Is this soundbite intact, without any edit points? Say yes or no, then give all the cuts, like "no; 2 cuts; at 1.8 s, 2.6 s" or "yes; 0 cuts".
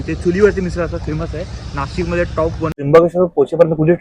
no; 1 cut; at 2.7 s